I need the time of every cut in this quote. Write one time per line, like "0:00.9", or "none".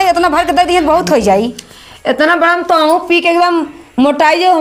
none

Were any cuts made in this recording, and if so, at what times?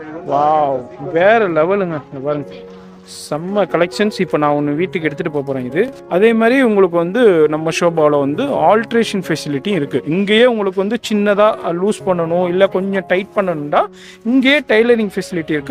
0:06.0

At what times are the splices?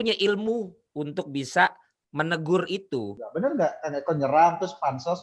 0:03.2

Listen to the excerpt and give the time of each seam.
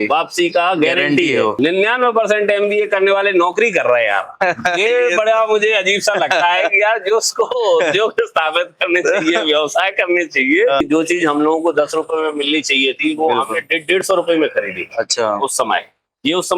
0:01.5
0:10.8

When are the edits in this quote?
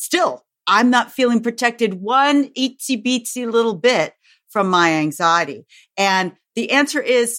none

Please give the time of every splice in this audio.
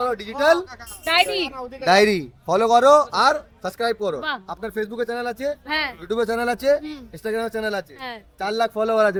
none

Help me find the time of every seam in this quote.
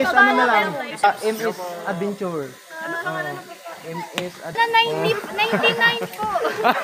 0:01.0
0:04.5

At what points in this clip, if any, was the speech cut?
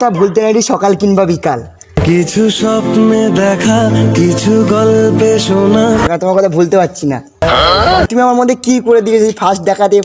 none

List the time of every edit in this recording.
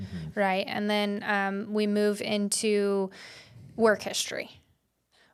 none

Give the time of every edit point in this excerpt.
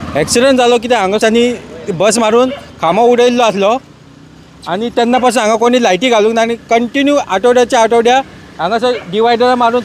0:01.2

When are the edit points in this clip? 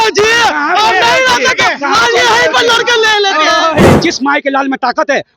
0:03.9

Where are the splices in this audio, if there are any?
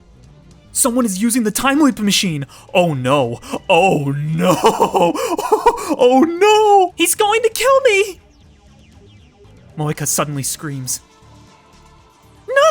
0:06.9

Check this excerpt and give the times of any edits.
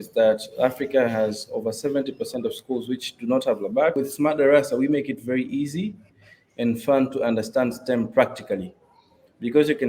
0:03.9

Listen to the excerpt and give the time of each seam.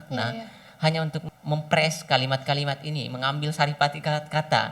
0:01.2

